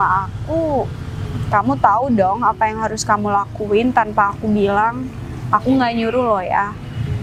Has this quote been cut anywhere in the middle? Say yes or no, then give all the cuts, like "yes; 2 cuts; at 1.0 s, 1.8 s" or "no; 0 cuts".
no; 0 cuts